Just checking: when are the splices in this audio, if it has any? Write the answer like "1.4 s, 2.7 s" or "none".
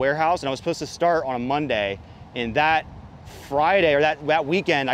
none